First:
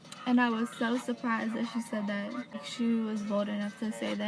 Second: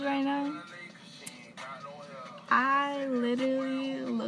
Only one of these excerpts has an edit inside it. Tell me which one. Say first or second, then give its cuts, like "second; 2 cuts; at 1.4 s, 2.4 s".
first; 1 cut; at 2.5 s